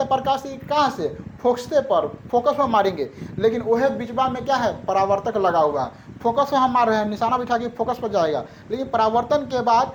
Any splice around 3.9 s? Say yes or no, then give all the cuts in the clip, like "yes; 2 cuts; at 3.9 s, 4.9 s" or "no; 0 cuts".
no; 0 cuts